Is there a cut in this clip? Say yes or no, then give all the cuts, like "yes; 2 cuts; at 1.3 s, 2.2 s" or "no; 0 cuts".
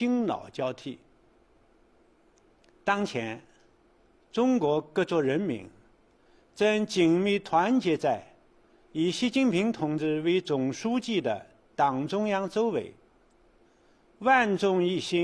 yes; 1 cut; at 10.5 s